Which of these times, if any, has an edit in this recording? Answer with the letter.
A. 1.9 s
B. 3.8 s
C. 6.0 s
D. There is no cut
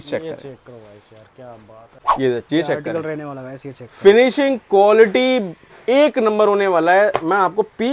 A